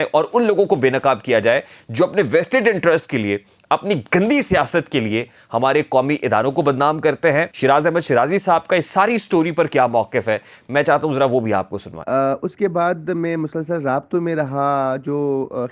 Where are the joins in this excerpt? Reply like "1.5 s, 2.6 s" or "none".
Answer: 7.5 s